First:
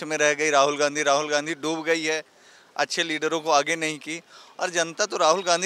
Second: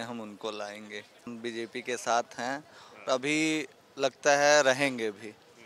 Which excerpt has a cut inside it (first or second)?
second